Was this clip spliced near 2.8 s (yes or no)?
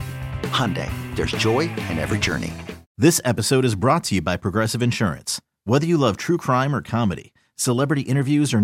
yes